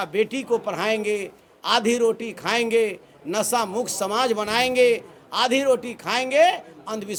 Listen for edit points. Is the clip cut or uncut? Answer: uncut